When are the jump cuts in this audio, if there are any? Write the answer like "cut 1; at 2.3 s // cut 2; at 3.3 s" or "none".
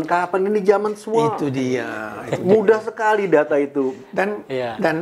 none